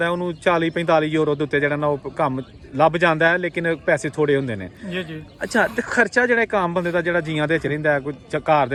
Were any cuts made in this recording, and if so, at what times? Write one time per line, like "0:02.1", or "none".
none